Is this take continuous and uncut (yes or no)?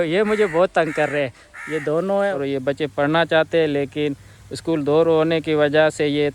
no